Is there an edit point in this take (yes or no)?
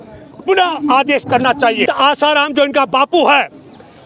yes